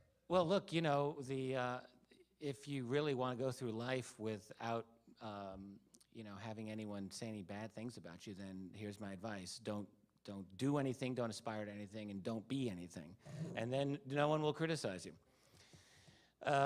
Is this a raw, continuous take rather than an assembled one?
no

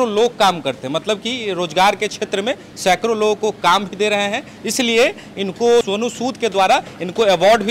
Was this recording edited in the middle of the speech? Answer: no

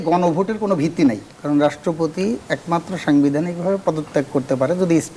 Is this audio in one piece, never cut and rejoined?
no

